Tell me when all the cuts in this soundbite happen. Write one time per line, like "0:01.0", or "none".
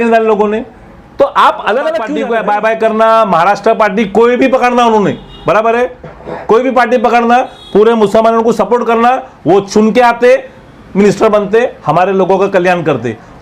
0:02.1

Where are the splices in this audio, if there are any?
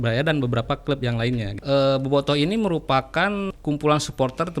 0:01.5
0:03.5

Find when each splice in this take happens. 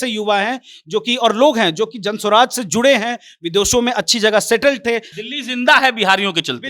0:05.2

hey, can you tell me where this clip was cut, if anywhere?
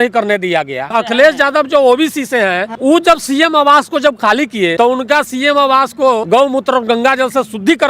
0:00.9
0:02.7
0:04.7
0:06.2

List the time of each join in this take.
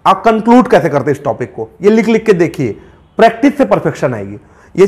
none

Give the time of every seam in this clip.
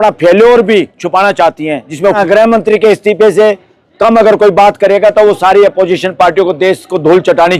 0:02.1

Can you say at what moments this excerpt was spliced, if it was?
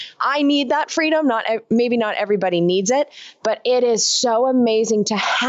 none

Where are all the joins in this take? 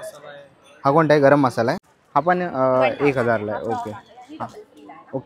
0:01.9

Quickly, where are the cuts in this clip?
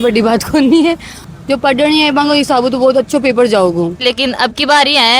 0:01.3
0:04.0

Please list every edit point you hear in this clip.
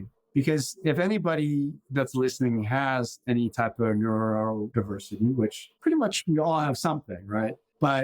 0:04.7
0:05.7

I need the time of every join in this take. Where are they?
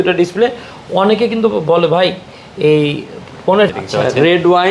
0:03.7

